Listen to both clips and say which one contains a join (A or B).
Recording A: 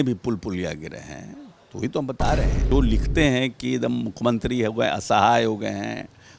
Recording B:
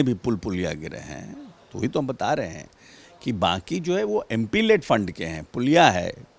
A